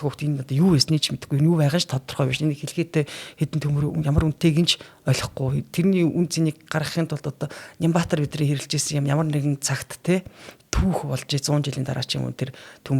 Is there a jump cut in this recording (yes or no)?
no